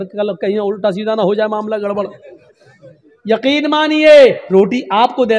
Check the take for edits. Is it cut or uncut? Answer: cut